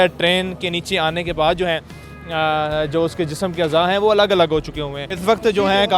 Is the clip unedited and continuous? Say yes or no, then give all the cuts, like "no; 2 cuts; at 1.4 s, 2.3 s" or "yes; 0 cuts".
no; 1 cut; at 5.0 s